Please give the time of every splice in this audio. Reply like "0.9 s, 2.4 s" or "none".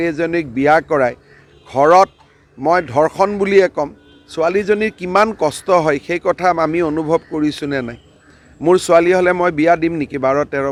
none

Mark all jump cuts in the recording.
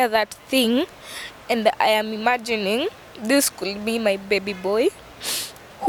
none

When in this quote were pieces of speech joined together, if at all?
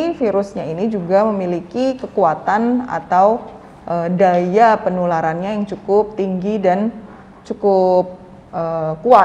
none

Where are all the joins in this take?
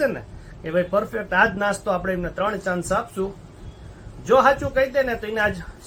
none

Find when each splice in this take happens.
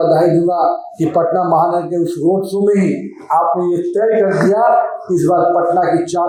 none

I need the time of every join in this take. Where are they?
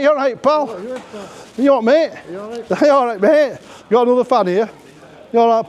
4.7 s

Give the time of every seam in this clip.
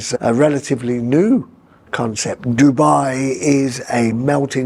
2.4 s

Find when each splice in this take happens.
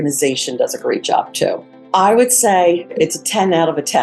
1.7 s, 2.9 s

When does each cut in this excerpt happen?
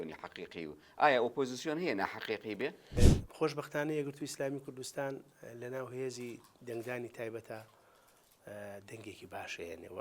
3.0 s

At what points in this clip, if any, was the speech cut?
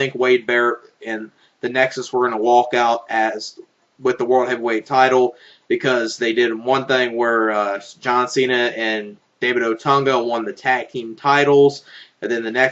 1.9 s

